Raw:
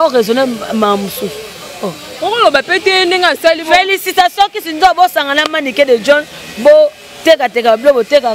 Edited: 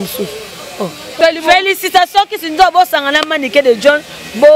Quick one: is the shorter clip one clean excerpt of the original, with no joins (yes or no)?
no